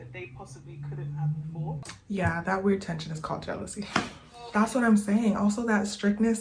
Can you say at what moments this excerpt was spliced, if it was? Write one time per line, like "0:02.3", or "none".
0:01.9
0:04.5